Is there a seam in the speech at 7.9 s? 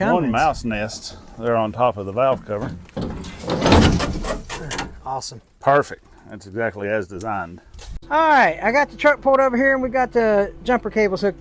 yes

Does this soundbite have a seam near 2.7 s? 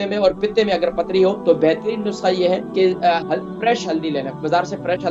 yes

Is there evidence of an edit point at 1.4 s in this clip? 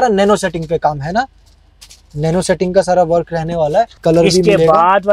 no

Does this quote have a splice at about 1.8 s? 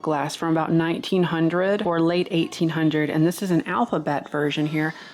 yes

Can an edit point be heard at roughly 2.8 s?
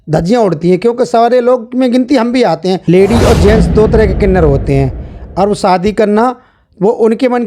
yes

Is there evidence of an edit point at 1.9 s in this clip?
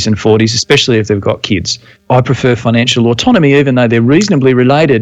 yes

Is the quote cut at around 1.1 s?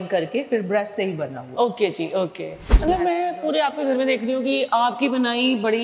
no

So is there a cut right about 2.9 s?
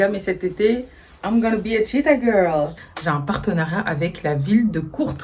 yes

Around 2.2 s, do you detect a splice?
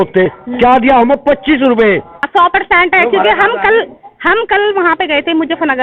yes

